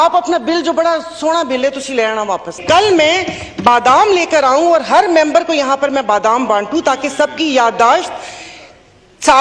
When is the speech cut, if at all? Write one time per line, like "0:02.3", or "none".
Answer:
0:02.6